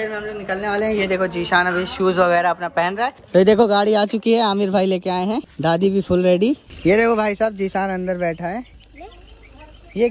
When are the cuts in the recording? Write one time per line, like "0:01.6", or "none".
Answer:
0:03.2
0:05.5
0:06.7